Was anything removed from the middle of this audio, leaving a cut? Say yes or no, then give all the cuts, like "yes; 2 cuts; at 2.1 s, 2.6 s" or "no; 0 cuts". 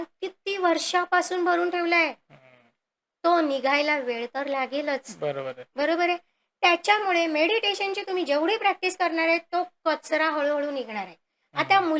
no; 0 cuts